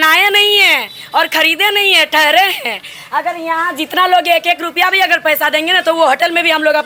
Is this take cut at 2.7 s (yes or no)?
no